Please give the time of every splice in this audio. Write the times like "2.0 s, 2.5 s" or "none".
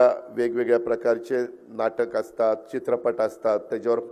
none